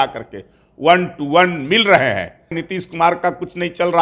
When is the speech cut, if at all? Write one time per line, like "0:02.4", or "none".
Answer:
0:02.6